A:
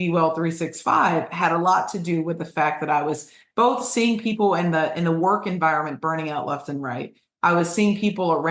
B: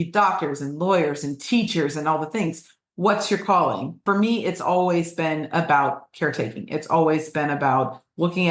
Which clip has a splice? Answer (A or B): B